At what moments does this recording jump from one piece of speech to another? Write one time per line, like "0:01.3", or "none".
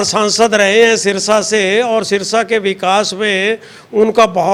none